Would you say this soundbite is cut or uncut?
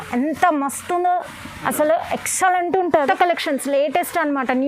cut